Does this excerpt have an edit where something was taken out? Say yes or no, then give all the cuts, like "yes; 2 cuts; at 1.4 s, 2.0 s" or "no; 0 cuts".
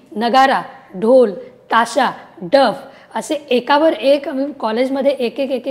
no; 0 cuts